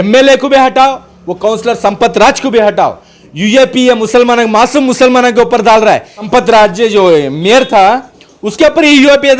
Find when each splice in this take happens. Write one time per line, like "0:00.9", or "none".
0:06.2